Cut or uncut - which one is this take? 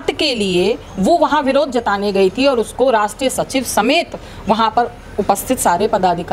uncut